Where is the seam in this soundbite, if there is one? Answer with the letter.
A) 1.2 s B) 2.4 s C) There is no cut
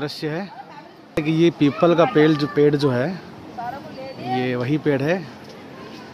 A